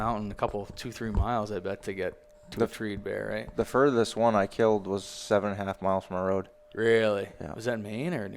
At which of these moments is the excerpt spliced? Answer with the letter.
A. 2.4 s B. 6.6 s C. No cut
B